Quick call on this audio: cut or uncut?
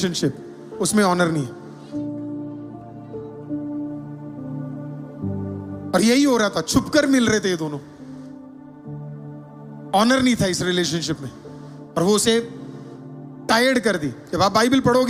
uncut